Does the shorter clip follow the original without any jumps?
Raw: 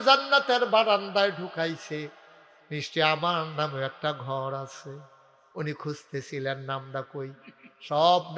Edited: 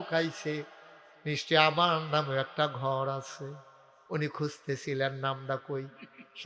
yes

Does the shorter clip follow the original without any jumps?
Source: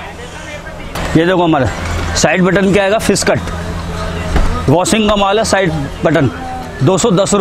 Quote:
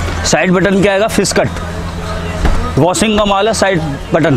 yes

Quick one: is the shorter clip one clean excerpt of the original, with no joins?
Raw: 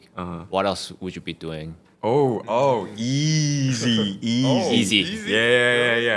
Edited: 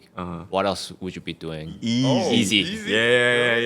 no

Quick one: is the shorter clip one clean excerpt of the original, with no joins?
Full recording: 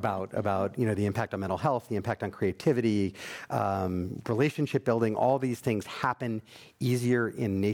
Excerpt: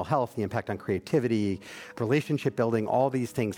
no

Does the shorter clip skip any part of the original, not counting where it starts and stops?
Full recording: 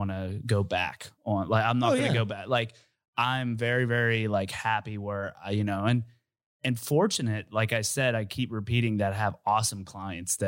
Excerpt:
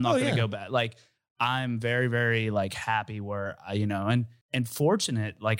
yes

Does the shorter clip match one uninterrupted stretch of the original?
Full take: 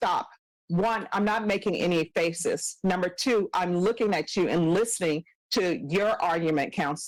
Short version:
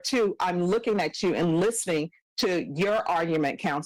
yes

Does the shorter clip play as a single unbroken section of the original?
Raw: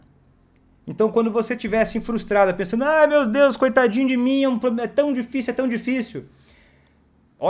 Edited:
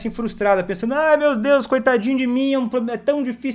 yes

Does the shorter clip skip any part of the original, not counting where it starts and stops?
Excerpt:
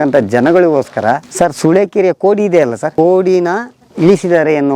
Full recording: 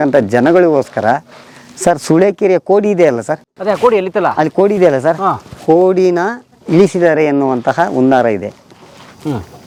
yes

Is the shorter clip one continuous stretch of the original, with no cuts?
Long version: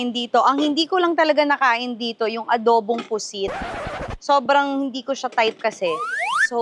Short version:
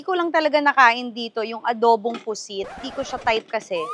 no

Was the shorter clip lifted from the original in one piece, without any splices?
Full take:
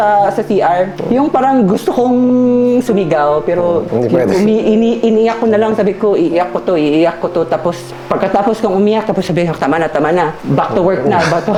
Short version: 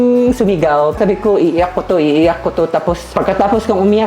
no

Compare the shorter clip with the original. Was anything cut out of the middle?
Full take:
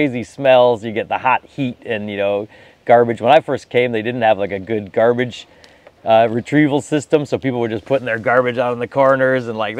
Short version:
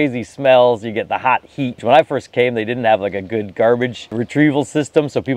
yes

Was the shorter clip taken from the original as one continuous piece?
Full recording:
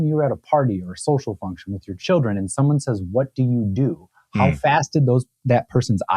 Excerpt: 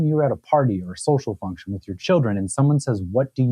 yes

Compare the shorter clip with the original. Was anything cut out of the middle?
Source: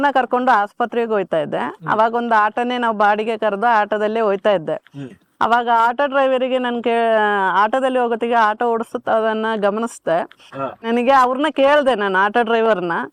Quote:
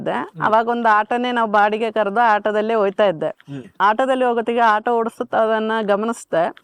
yes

